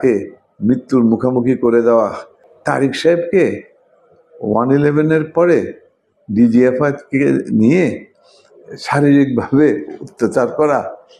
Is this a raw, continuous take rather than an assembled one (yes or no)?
no